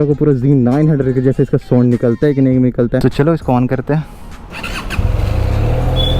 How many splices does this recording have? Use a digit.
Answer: 2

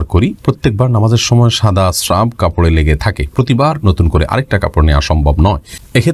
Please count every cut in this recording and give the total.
0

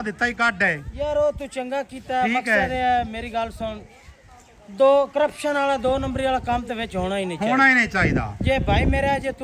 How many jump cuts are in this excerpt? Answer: 0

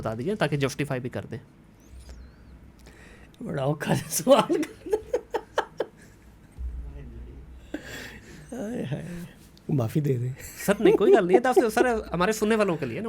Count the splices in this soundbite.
0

